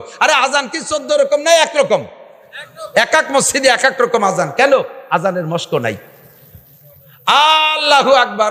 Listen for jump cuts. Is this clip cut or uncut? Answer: uncut